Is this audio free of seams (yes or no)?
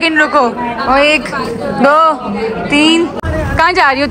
no